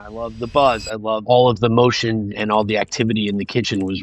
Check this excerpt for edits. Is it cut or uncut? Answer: cut